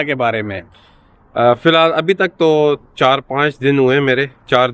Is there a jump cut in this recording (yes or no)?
no